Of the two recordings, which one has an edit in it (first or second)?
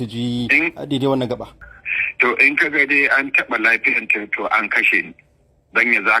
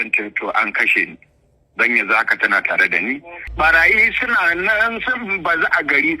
second